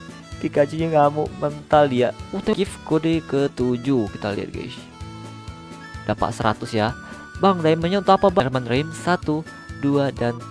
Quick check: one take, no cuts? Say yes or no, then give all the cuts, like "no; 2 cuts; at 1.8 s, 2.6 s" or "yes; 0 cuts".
no; 4 cuts; at 2.5 s, 4.7 s, 6.0 s, 8.4 s